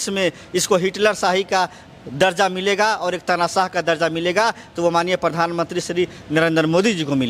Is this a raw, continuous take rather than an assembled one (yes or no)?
yes